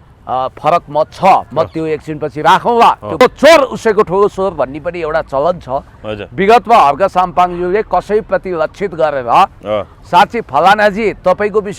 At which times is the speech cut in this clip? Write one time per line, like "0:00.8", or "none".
0:03.2